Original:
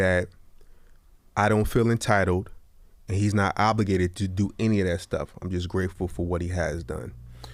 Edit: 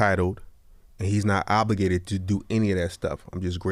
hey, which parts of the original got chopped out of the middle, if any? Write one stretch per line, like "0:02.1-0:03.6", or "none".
none